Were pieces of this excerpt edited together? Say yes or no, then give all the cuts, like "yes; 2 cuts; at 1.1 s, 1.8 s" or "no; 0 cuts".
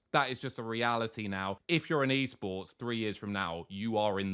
yes; 1 cut; at 1.6 s